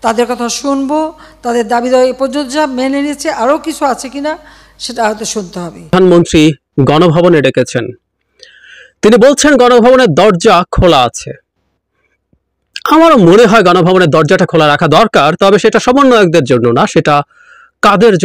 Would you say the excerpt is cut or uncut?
cut